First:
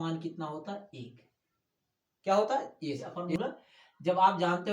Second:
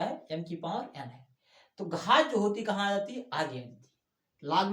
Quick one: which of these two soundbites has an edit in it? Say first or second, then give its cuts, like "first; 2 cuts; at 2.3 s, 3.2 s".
first; 1 cut; at 3.2 s